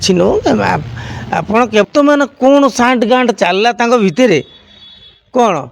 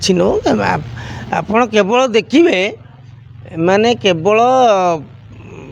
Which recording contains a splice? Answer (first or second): first